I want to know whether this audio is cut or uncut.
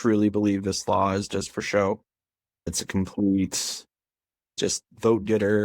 cut